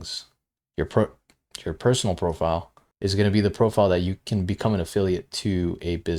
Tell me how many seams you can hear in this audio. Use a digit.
1